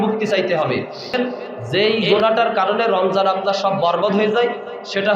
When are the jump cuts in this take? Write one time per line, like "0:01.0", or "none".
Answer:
0:01.2